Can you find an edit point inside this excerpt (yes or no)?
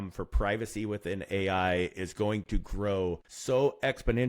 yes